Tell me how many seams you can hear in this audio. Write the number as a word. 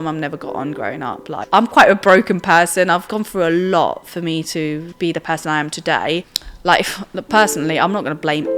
four